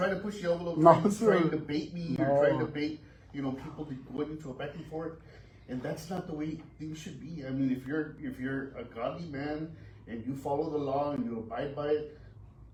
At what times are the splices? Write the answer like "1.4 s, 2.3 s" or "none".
none

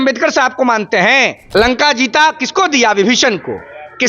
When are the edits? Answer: 1.4 s

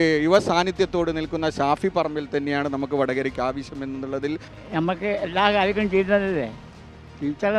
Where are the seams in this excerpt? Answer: 4.5 s

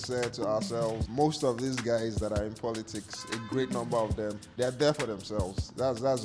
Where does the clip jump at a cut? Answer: 1.0 s, 4.5 s

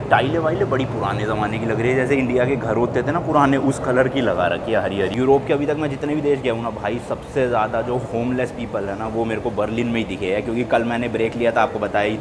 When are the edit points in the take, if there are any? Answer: none

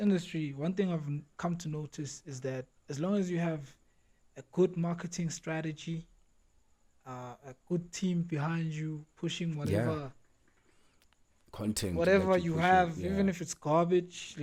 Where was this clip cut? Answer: none

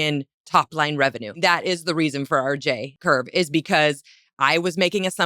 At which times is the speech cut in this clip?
1.4 s, 2.9 s

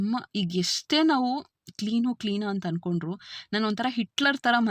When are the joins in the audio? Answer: none

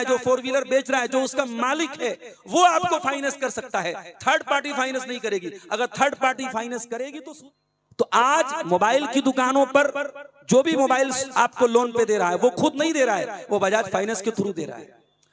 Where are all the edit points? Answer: 7.2 s

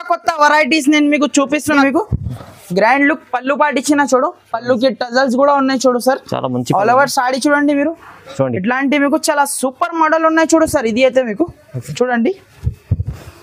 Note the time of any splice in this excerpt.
1.8 s

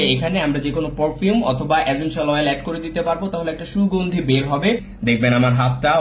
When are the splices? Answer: 4.9 s

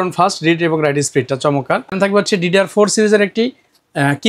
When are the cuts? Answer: 1.9 s

